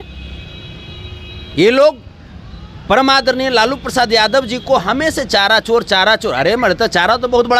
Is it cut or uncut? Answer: uncut